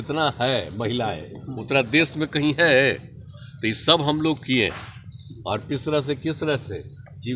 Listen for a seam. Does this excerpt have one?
no; 0 cuts

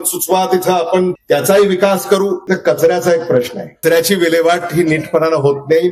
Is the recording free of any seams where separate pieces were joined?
no; 3 cuts; at 1.2 s, 2.4 s, 3.8 s

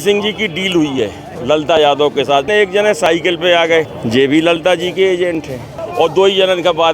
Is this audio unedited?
no; 3 cuts; at 2.5 s, 4.0 s, 5.8 s

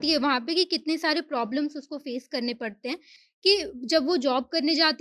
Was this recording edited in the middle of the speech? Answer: no; 0 cuts

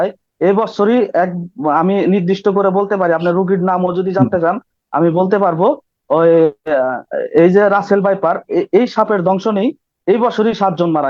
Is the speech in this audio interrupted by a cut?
no; 0 cuts

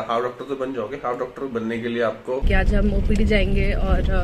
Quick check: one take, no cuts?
no; 1 cut; at 2.4 s

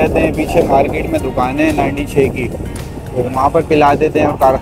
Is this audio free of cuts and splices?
yes; 0 cuts

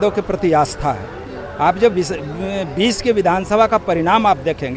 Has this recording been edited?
no; 0 cuts

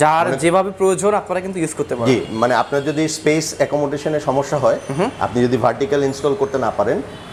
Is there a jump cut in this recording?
no; 0 cuts

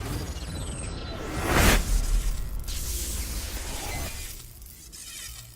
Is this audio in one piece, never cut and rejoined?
no; 1 cut; at 1.9 s

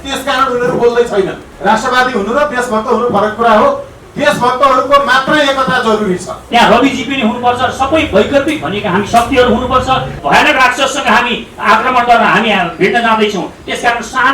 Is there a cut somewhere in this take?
yes; 3 cuts; at 1.4 s, 6.4 s, 10.2 s

